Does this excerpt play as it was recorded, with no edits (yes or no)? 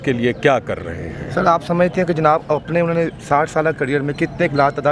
yes